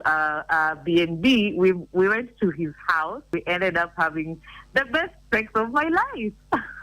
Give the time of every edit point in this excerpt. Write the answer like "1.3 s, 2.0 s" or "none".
3.3 s